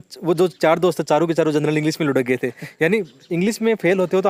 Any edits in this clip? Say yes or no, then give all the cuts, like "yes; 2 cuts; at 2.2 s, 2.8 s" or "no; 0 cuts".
no; 0 cuts